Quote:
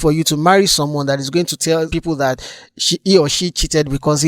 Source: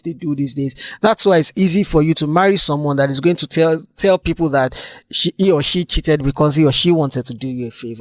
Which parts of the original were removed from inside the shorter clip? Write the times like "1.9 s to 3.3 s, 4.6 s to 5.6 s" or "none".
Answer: 3.8 s to 4.2 s